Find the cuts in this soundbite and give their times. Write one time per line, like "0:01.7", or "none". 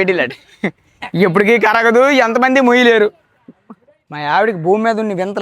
0:03.6